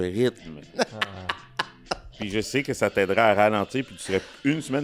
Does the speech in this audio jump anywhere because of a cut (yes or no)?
no